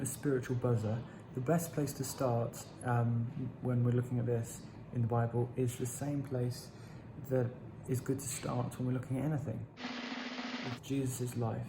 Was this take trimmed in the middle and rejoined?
yes; 2 cuts; at 9.7 s, 10.8 s

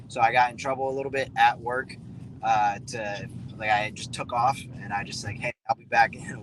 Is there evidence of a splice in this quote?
no; 0 cuts

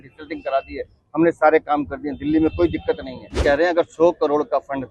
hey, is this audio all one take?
no; 1 cut; at 3.4 s

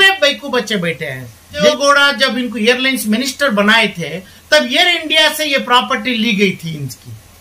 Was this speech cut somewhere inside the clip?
yes; 1 cut; at 1.6 s

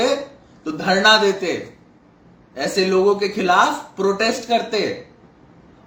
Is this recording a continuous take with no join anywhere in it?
yes; 0 cuts

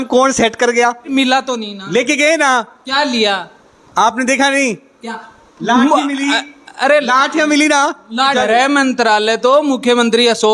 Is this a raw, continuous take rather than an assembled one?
no; 2 cuts; at 1.2 s, 8.3 s

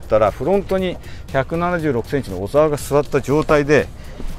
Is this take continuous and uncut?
yes; 0 cuts

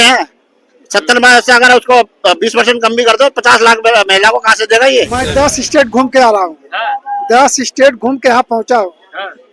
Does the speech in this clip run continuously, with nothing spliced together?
no; 1 cut; at 5.3 s

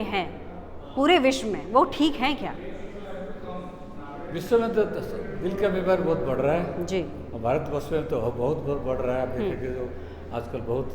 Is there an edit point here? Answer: no; 0 cuts

